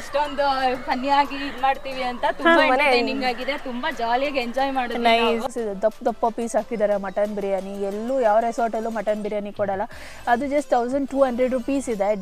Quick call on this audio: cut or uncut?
cut